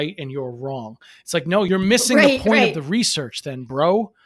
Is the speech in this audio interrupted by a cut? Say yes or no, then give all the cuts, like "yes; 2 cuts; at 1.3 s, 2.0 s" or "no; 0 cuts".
yes; 1 cut; at 1.7 s